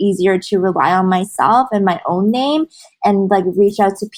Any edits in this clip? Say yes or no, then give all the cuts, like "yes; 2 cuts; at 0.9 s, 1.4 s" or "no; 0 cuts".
no; 0 cuts